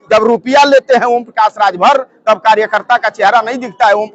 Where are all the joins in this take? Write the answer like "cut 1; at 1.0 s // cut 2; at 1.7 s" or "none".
none

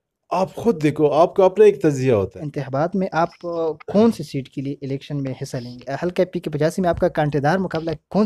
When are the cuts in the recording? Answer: cut 1; at 2.5 s // cut 2; at 5.9 s

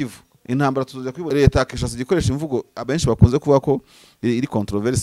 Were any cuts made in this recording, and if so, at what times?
cut 1; at 1.2 s

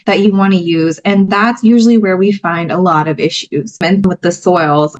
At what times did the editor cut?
cut 1; at 4.0 s

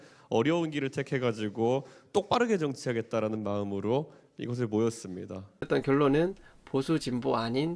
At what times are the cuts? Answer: cut 1; at 5.6 s

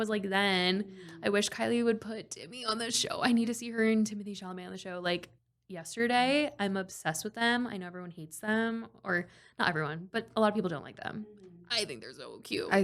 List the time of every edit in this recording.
none

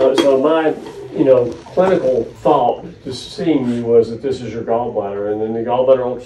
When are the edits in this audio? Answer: none

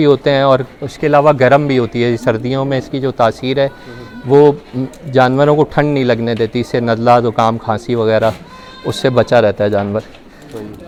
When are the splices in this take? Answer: none

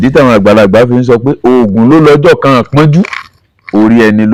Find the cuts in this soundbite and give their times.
none

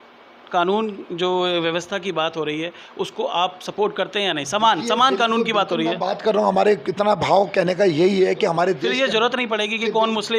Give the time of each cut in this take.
none

